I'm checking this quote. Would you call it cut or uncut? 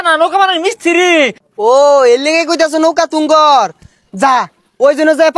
cut